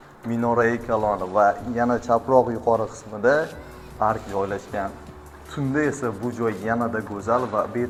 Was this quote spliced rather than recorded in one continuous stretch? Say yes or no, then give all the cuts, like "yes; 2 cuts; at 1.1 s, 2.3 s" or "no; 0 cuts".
no; 0 cuts